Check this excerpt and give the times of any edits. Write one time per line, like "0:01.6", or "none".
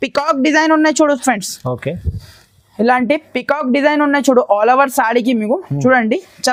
none